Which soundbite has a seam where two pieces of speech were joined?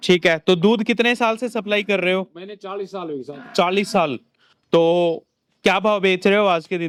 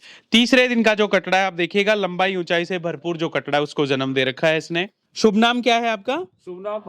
second; 1 cut; at 5.0 s

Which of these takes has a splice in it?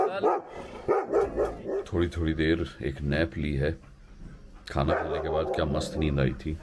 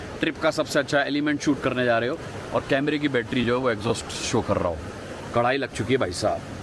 first; 1 cut; at 1.6 s

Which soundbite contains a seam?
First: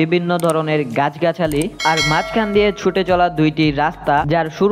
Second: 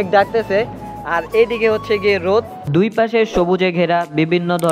second; 1 cut; at 2.6 s

